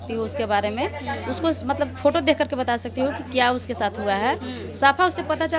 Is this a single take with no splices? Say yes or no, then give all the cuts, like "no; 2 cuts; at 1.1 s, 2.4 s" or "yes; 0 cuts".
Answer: yes; 0 cuts